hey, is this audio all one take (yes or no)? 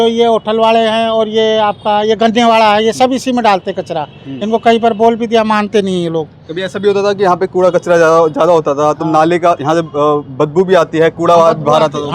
yes